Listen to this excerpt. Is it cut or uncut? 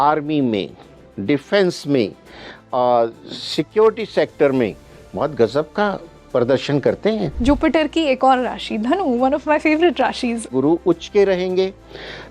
cut